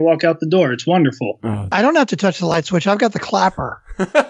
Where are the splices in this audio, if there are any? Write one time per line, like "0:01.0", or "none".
0:01.7
0:02.5